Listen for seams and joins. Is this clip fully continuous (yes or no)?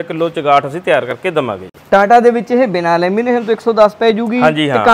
yes